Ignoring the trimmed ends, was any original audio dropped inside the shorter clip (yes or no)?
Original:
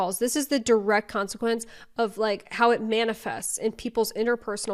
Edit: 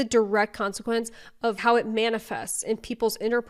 yes